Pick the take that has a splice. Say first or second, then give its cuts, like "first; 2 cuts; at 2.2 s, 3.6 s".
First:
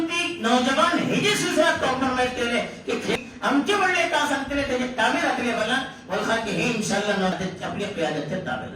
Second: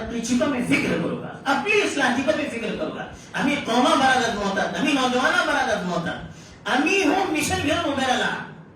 first; 2 cuts; at 3.2 s, 7.3 s